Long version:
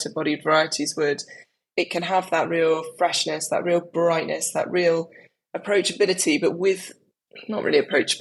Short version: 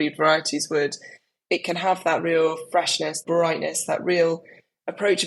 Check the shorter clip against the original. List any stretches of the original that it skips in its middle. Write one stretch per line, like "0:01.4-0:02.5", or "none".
0:03.5-0:03.9